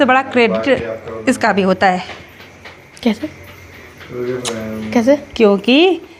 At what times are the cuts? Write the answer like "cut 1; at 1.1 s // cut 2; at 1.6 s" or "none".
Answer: none

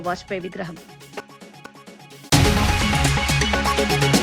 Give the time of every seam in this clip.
cut 1; at 1.7 s

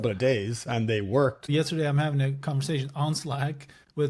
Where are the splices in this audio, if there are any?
cut 1; at 1.5 s

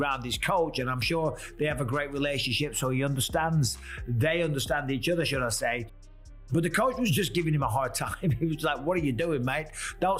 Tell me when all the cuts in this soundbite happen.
none

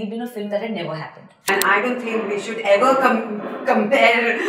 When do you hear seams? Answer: cut 1; at 1.5 s

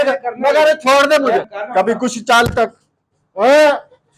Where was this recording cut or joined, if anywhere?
cut 1; at 1.6 s

